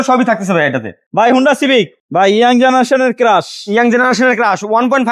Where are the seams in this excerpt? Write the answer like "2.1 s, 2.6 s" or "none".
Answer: 1.0 s, 2.0 s